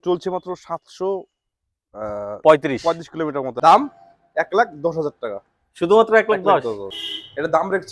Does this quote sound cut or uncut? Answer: cut